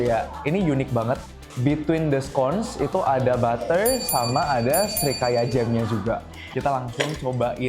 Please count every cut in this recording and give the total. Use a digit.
2